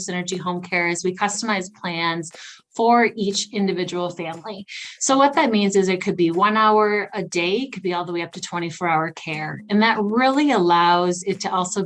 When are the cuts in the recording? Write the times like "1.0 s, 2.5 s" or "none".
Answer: none